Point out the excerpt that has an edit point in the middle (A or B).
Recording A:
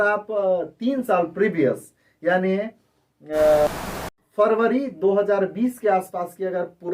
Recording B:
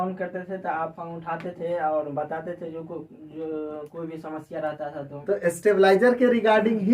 A